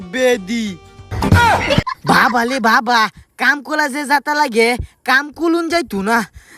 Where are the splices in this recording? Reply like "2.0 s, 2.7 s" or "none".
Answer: 1.9 s